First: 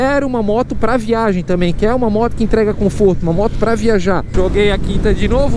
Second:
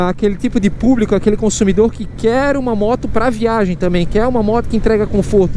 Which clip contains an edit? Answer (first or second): first